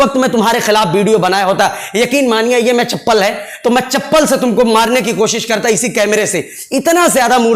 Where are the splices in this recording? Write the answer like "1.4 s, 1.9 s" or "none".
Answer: none